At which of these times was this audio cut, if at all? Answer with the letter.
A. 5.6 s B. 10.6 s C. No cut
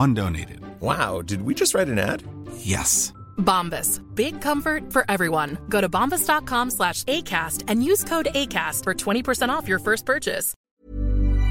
B